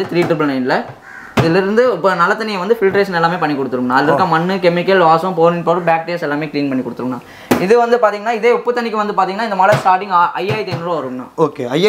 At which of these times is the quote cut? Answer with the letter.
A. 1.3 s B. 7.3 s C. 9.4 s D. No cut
D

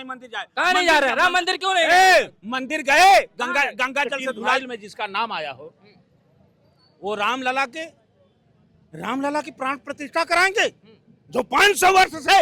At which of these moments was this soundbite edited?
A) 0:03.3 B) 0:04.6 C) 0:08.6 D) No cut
B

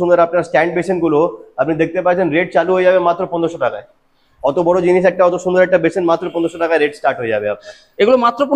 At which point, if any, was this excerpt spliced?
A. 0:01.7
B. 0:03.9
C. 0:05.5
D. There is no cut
D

